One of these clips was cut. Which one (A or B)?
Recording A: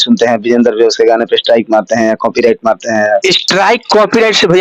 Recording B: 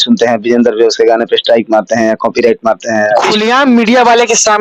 B